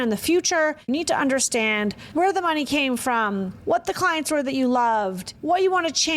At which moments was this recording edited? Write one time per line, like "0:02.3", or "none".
0:00.9
0:02.0
0:03.5
0:05.3

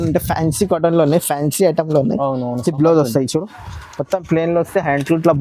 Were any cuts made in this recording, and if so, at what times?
none

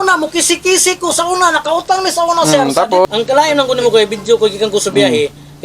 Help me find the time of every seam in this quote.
0:03.0

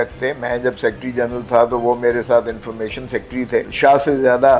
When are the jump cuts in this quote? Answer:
0:03.7

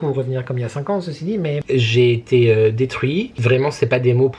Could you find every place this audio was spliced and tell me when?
0:01.6
0:03.3

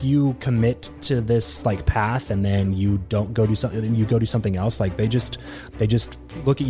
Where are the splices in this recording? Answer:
none

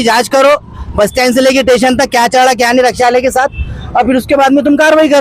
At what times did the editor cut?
none

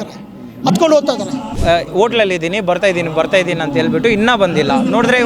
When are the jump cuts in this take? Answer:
0:01.5

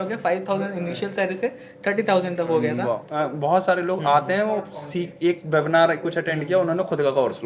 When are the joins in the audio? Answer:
0:03.1

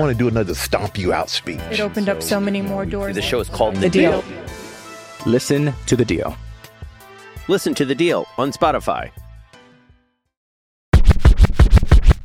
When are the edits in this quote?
0:10.9

